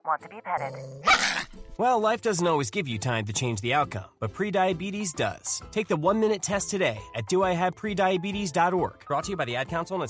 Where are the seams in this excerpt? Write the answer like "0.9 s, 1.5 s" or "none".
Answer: none